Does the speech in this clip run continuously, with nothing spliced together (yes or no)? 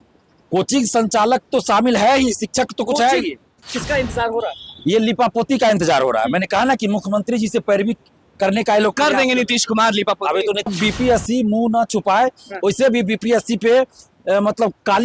no